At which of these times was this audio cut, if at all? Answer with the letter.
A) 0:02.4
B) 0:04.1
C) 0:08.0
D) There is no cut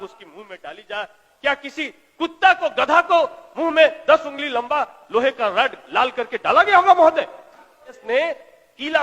C